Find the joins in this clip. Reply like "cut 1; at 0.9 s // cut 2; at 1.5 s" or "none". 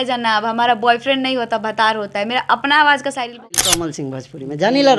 cut 1; at 3.5 s